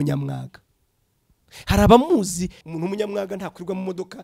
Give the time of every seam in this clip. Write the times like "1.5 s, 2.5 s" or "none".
2.6 s